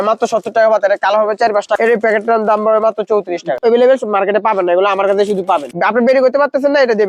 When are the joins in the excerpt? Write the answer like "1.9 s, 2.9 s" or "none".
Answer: 1.7 s, 3.6 s, 5.7 s